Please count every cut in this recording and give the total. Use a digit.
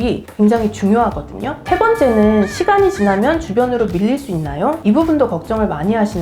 1